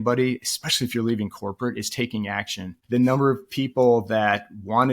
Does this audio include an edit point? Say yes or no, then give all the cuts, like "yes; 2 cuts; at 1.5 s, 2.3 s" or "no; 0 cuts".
yes; 1 cut; at 2.7 s